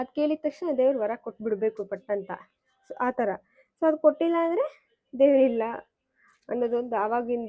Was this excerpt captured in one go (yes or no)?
yes